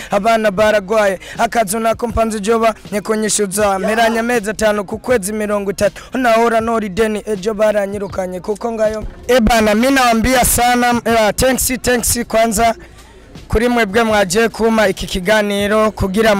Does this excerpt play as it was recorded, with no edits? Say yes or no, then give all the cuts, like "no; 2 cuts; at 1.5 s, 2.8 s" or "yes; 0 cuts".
no; 1 cut; at 9.0 s